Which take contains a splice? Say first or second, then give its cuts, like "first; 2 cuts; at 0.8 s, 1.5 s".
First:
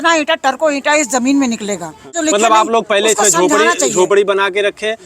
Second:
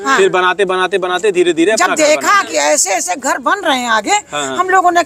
first; 1 cut; at 2.1 s